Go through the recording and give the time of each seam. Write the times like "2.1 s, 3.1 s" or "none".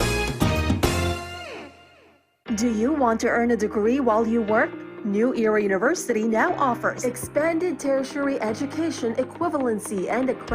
2.3 s